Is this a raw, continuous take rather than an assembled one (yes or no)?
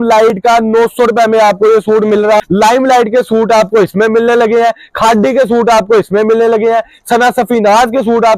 no